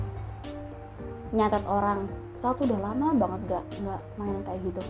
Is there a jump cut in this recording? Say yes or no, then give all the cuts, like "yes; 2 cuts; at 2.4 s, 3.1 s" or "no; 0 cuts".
no; 0 cuts